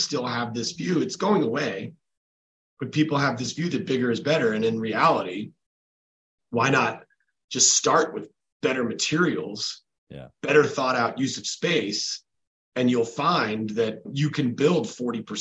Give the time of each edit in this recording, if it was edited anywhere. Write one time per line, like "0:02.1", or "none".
none